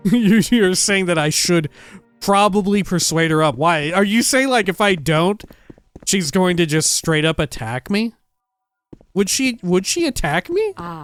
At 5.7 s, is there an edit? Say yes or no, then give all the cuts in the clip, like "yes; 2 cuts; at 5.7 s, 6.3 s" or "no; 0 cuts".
no; 0 cuts